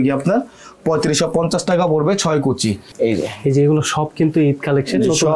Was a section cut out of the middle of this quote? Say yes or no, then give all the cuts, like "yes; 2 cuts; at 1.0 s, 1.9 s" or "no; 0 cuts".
yes; 1 cut; at 2.9 s